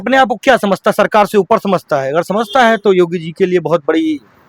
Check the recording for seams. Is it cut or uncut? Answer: uncut